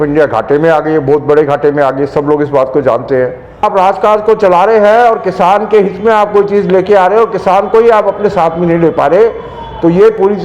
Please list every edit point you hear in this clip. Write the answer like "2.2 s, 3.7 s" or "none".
3.6 s